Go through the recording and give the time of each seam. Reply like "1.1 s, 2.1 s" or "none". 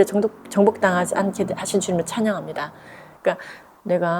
3.3 s